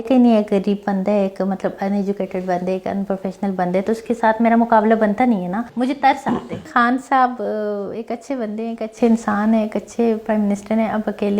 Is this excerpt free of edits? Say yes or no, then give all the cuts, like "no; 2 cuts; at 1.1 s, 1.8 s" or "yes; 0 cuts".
no; 2 cuts; at 5.6 s, 6.7 s